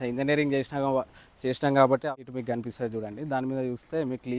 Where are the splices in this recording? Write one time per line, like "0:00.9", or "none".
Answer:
0:02.0